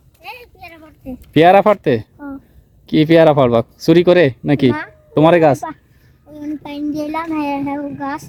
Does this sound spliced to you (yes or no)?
no